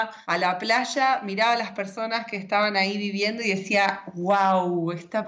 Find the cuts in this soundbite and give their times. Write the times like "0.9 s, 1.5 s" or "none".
none

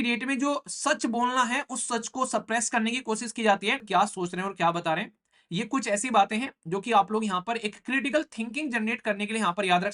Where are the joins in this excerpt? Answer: 3.8 s

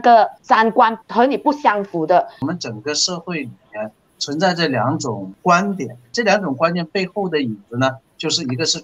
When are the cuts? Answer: 0.8 s, 2.4 s, 5.3 s, 6.1 s

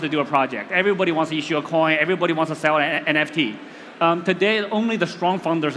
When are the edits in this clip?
none

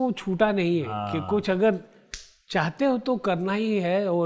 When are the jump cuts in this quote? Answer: none

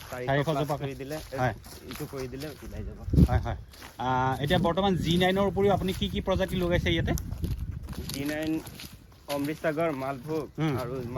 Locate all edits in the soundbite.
none

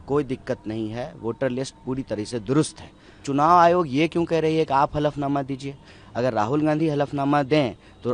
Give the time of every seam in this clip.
3.2 s

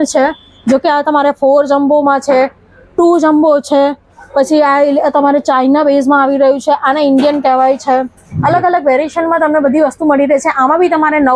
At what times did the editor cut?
none

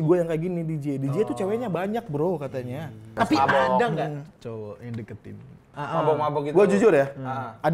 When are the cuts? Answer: 3.1 s, 5.7 s

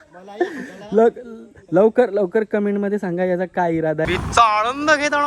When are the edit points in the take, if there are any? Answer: 4.1 s

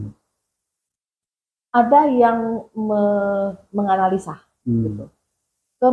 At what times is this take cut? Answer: none

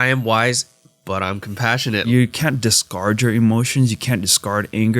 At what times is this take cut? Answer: 2.0 s

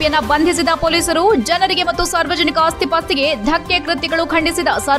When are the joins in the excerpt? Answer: none

